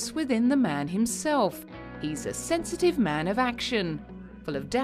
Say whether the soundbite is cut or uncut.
cut